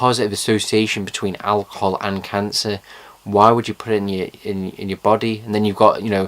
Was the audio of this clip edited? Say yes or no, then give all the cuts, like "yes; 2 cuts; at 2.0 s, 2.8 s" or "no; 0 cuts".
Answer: yes; 1 cut; at 3.5 s